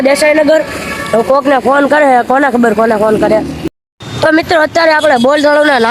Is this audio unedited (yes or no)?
no